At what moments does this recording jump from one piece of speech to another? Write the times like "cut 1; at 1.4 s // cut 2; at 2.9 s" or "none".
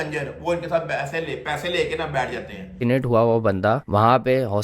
cut 1; at 2.6 s